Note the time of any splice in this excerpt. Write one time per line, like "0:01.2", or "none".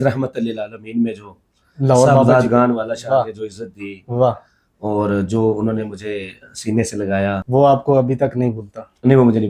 0:07.4